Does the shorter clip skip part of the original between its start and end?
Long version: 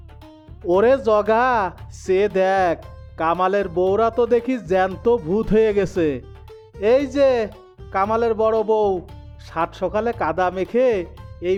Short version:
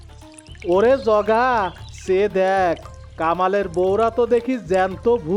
no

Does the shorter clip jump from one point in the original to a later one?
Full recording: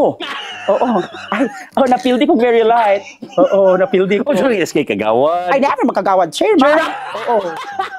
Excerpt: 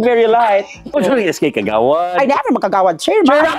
yes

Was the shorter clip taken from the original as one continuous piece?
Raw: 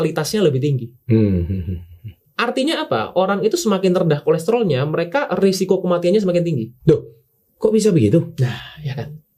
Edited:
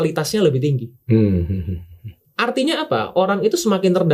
yes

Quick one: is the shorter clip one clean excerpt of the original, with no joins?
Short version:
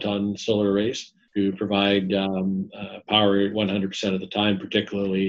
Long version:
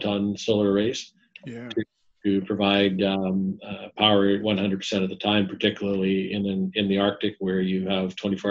no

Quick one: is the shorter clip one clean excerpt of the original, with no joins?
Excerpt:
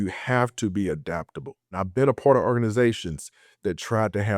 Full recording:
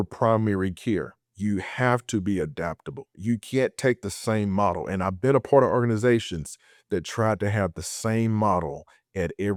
no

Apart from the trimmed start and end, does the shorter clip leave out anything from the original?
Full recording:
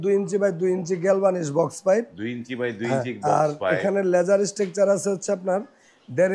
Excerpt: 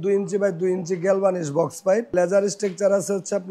yes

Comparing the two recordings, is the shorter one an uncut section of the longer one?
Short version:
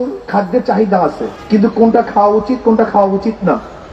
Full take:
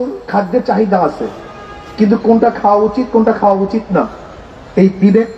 no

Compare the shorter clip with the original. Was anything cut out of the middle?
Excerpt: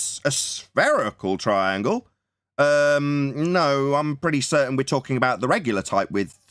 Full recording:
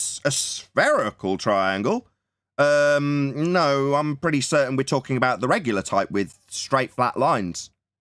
no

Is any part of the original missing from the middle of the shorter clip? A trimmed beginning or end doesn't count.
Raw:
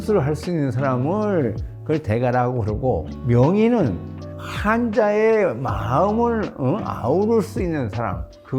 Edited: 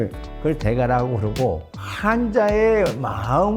yes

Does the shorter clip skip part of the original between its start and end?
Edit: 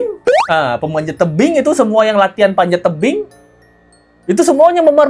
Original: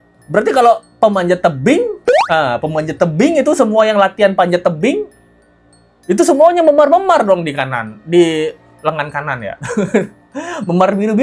no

